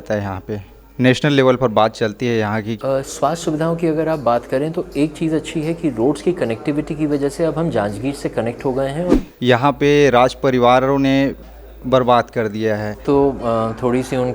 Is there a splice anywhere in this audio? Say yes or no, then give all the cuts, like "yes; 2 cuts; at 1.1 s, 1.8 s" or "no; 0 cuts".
yes; 3 cuts; at 2.8 s, 9.2 s, 12.9 s